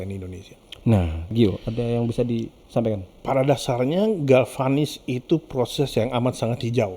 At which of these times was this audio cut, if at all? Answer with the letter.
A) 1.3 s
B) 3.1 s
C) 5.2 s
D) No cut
A